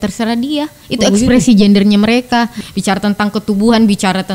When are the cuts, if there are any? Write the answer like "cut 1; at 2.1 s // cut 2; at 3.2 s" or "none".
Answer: cut 1; at 2.6 s